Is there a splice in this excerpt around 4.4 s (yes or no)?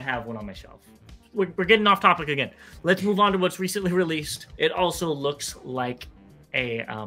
yes